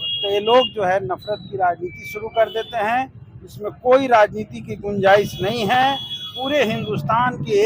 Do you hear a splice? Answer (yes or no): no